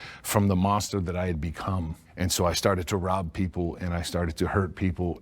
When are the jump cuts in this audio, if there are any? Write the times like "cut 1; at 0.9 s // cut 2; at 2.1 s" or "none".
cut 1; at 2.0 s